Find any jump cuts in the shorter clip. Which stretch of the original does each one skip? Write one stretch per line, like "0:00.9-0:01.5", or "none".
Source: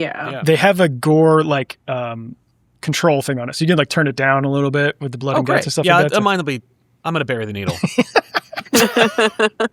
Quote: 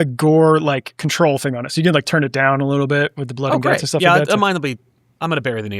0:01.7-0:02.7